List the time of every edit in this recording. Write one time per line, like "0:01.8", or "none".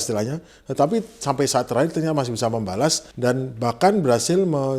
0:03.1